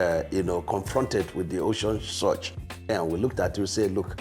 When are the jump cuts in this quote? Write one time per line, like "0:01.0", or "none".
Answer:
0:02.9